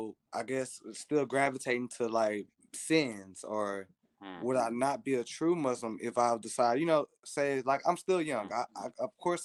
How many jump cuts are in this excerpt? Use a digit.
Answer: 0